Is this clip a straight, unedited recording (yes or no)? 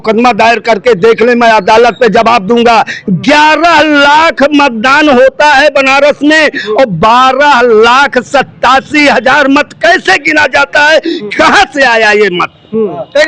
yes